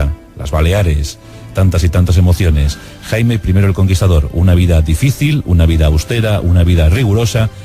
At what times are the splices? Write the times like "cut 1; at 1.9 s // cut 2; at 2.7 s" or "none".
cut 1; at 3.9 s